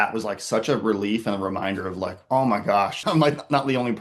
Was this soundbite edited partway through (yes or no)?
yes